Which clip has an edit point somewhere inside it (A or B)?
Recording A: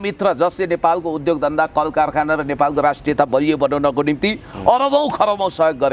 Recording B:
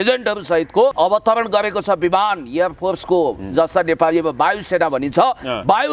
B